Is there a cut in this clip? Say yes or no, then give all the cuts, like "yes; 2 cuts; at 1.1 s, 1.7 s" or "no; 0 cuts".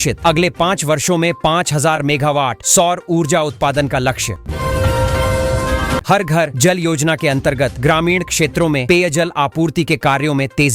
yes; 2 cuts; at 4.4 s, 6.0 s